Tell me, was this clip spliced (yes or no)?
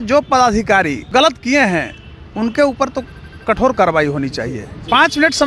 yes